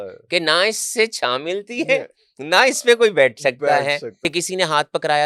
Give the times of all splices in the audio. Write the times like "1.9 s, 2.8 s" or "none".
4.1 s